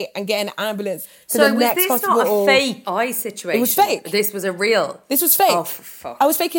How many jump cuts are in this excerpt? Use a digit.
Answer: 1